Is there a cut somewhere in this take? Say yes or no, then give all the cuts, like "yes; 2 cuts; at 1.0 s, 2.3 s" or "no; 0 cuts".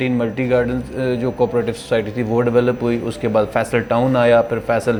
no; 0 cuts